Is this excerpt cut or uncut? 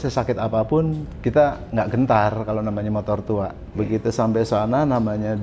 cut